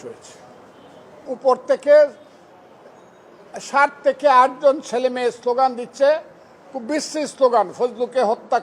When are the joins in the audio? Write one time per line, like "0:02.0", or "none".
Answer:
0:01.3